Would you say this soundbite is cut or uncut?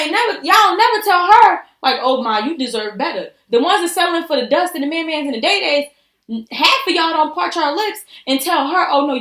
uncut